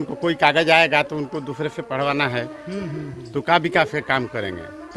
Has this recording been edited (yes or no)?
no